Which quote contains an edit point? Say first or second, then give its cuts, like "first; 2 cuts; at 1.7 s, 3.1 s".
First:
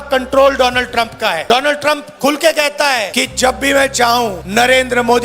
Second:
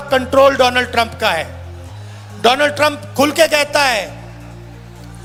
first; 3 cuts; at 1.4 s, 3.1 s, 4.4 s